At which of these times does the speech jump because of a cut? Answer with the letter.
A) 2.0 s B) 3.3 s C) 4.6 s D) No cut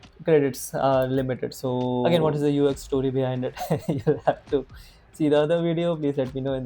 A